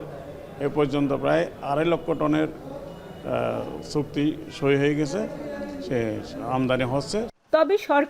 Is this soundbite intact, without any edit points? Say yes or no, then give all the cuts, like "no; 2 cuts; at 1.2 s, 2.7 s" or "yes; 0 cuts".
yes; 0 cuts